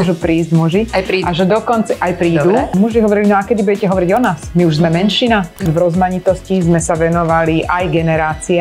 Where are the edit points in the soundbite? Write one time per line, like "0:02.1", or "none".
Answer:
0:02.7
0:05.7